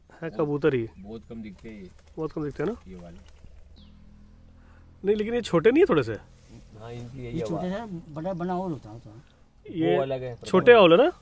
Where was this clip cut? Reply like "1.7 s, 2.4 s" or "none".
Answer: 3.8 s